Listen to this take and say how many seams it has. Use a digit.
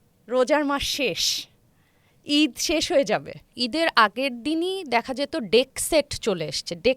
1